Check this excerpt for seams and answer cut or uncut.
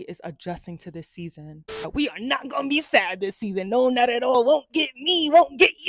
cut